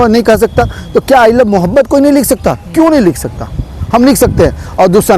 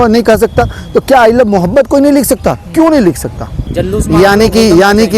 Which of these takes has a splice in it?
second; 1 cut; at 3.7 s

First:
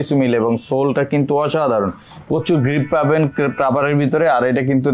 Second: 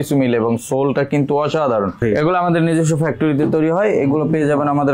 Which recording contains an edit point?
second; 1 cut; at 2.0 s

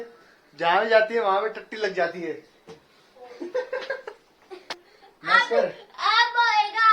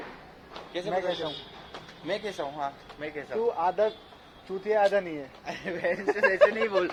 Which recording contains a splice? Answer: first; 1 cut; at 4.7 s

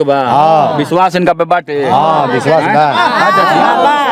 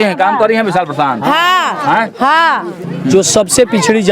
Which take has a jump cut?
second; 1 cut; at 2.8 s

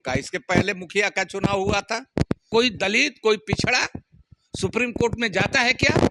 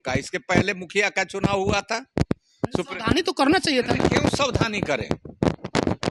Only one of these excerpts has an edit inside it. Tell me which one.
first; 1 cut; at 2.5 s

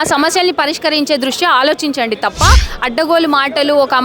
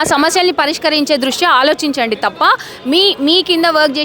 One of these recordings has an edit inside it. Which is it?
first; 1 cut; at 2.7 s

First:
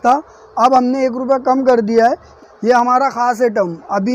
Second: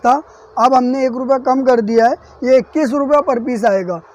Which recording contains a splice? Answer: first; 1 cut; at 2.3 s

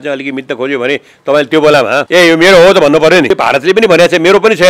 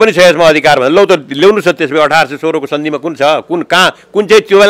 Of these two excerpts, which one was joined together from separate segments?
first; 2 cuts; at 2.0 s, 3.3 s

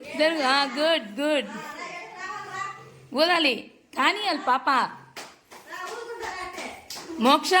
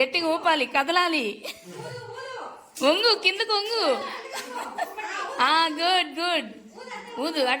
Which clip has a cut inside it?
first; 1 cut; at 6.0 s

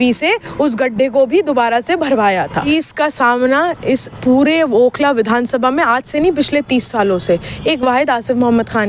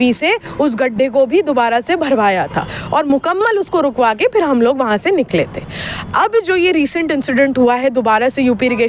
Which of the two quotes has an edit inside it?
first; 1 cut; at 2.7 s

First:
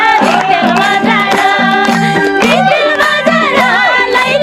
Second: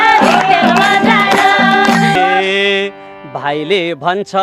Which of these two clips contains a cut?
second; 1 cut; at 2.2 s

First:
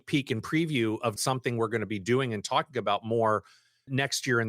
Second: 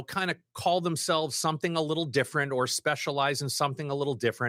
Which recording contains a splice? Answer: first; 1 cut; at 1.2 s

